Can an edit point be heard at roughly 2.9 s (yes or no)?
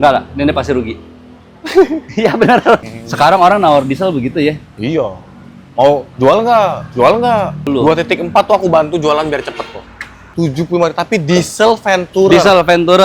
yes